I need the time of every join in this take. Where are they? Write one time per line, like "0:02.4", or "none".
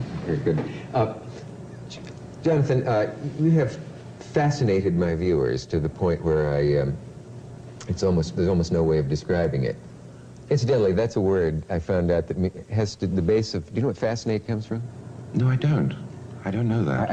none